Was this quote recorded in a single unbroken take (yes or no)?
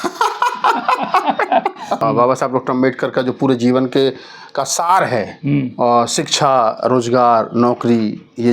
no